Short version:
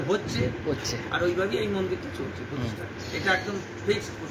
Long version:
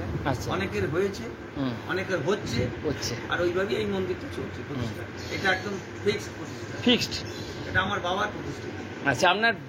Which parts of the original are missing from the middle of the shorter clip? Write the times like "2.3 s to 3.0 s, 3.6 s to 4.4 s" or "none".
none